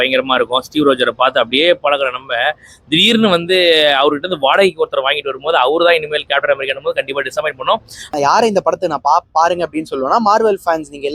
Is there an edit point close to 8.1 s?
yes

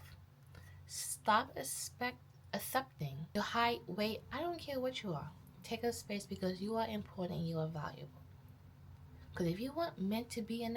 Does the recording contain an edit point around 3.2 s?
yes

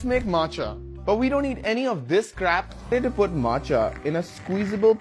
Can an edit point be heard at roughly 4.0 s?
no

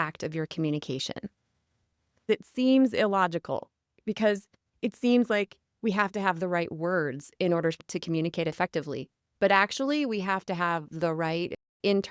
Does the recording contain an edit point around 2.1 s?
yes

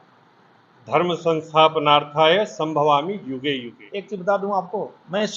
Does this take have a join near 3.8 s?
yes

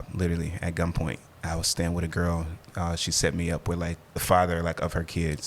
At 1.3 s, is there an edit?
no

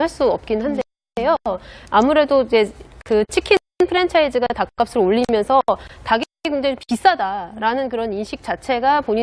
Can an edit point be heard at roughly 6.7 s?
yes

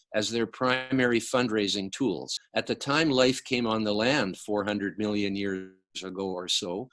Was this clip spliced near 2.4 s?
yes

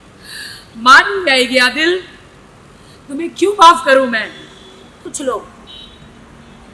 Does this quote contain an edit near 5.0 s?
yes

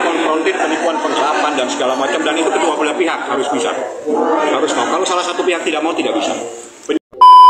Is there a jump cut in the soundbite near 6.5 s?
yes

